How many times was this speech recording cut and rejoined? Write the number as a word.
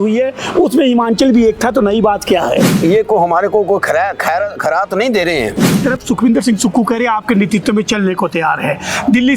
two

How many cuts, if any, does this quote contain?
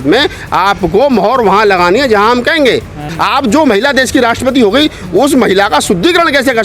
one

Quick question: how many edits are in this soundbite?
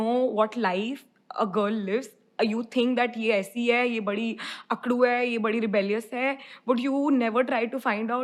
zero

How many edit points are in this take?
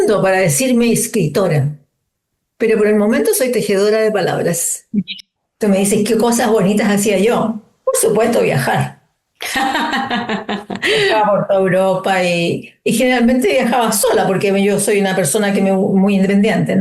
one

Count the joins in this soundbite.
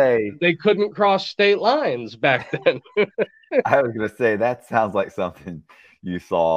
zero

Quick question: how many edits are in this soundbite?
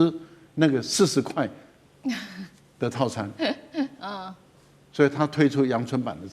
zero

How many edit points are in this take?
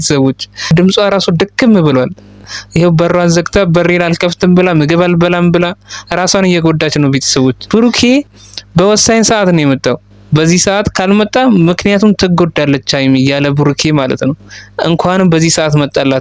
one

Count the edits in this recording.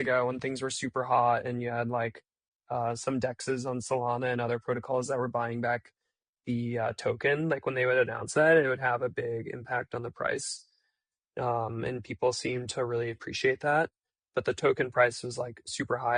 zero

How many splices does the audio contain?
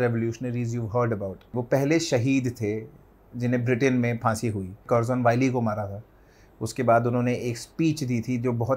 two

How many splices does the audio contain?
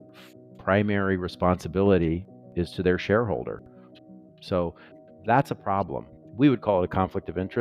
two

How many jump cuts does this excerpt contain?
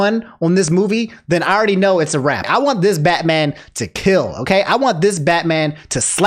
one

